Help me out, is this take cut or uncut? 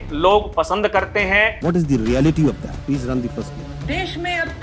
cut